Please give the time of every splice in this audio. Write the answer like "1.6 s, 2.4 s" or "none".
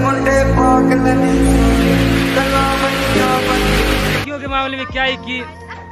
4.2 s